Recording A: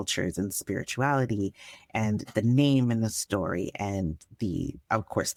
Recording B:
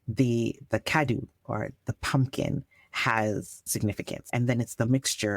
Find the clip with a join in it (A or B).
B